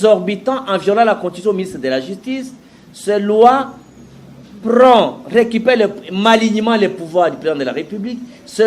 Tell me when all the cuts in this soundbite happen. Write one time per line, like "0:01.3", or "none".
none